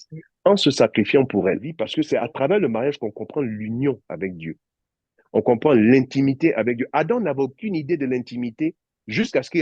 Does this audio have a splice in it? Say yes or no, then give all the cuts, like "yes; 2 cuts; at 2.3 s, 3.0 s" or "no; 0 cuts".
yes; 1 cut; at 1.8 s